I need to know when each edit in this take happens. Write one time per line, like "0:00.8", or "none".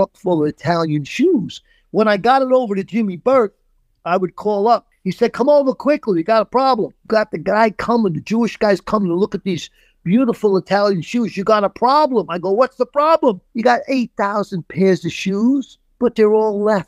0:05.0
0:07.0
0:13.5
0:15.8